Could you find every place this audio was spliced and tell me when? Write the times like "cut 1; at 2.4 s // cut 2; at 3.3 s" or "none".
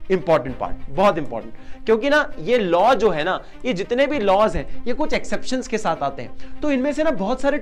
none